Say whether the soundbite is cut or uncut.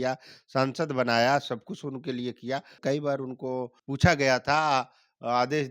cut